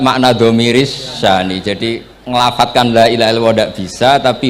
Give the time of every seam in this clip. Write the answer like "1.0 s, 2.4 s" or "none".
2.1 s

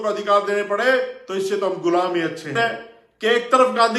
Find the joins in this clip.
2.5 s

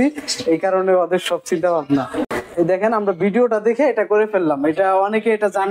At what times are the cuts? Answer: 2.3 s

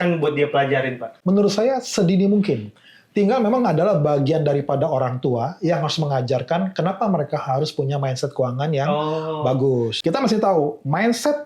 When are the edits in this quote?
1.1 s, 9.9 s

